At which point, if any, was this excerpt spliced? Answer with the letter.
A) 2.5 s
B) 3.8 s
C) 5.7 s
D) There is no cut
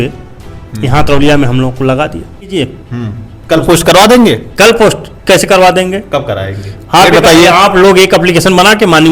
A